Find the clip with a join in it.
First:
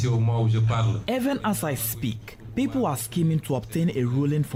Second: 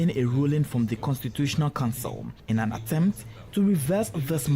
second; 1 cut; at 2.3 s

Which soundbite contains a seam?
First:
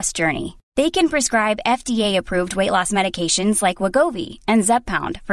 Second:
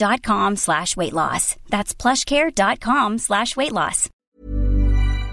second; 1 cut; at 4.3 s

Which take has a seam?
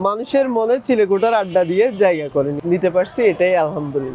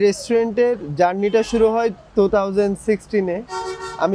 first; 1 cut; at 2.6 s

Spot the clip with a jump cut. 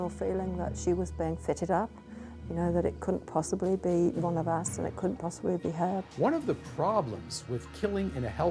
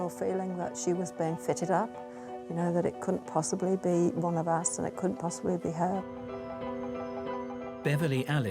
first; 1 cut; at 6.1 s

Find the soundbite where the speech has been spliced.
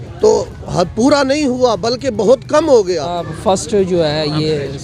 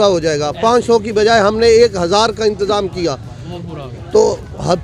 first; 1 cut; at 3.2 s

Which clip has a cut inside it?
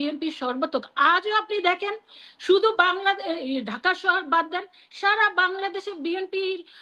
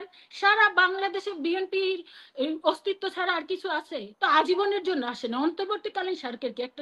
second; 1 cut; at 4.2 s

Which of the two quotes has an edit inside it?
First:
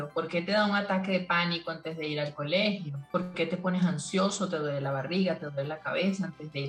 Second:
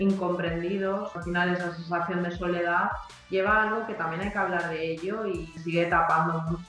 second; 2 cuts; at 1.2 s, 5.5 s

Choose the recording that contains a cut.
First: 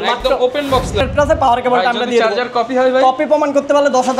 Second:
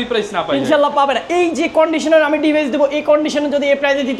first; 1 cut; at 1.0 s

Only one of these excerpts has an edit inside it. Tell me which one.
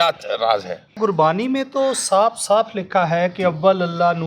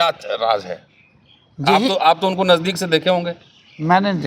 first; 1 cut; at 1.0 s

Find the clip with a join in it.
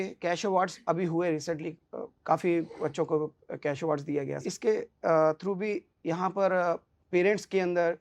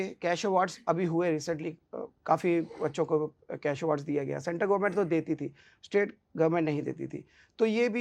first; 1 cut; at 4.4 s

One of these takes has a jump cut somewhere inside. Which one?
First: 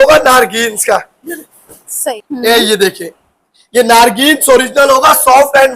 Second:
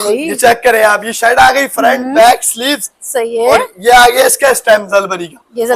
first; 1 cut; at 2.1 s

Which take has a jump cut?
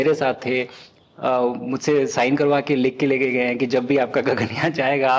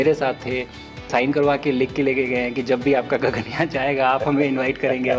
second; 1 cut; at 1.1 s

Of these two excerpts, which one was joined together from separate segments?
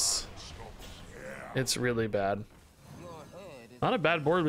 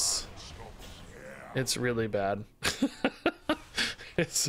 first; 1 cut; at 2.6 s

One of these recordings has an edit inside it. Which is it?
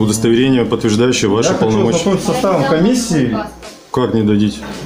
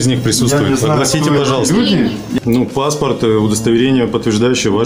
second; 1 cut; at 2.4 s

